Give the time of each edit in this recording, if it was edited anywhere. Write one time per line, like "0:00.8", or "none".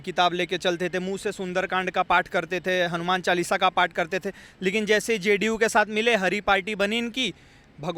none

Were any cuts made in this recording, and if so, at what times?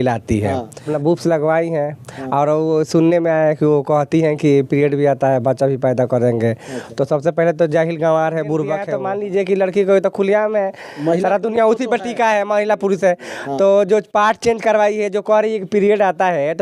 0:00.9
0:08.9

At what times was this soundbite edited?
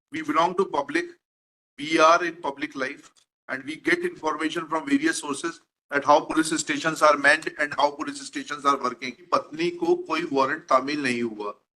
0:09.3

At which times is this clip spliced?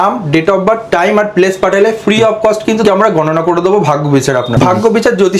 0:02.8
0:04.5

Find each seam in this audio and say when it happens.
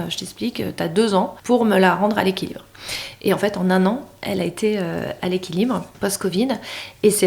0:01.4
0:05.1
0:05.9

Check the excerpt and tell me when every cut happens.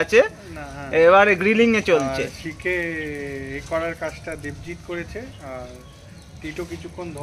none

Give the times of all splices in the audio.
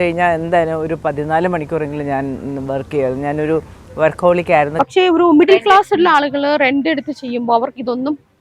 0:04.7

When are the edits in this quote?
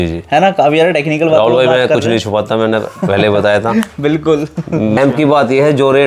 0:05.0

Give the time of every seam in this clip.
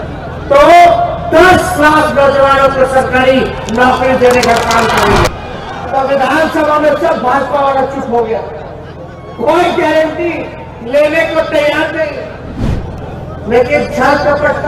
0:05.3
0:12.7

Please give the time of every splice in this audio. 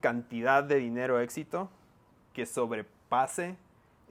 none

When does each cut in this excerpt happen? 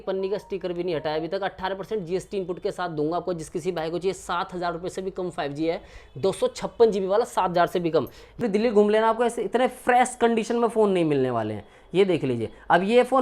0:08.4

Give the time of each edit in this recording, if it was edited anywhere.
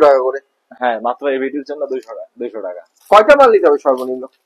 0:02.9

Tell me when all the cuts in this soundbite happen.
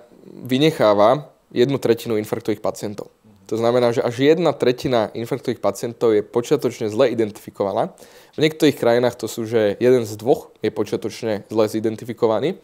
none

